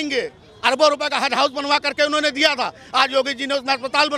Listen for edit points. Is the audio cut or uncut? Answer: uncut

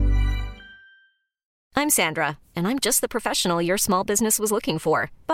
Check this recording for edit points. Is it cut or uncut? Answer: cut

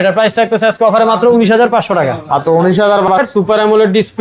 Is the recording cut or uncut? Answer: cut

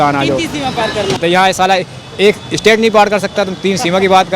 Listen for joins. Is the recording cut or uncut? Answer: cut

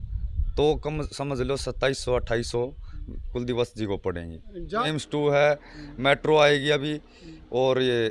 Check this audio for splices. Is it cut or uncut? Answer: cut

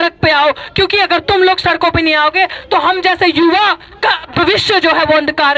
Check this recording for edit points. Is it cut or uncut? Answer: uncut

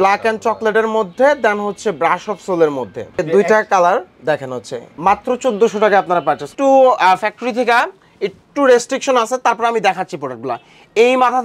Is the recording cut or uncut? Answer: cut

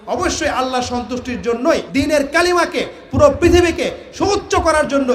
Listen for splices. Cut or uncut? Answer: uncut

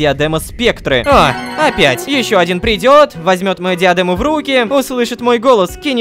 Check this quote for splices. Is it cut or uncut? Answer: uncut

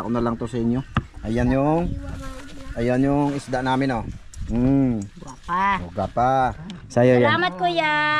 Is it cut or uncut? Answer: cut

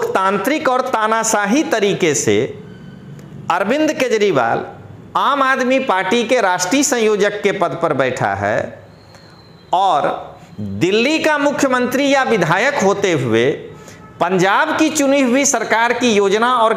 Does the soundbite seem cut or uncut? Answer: uncut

